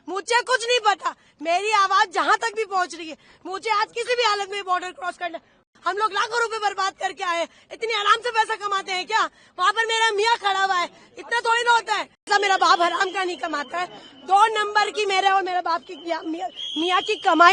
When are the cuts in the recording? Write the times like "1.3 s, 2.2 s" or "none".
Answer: 5.6 s, 12.3 s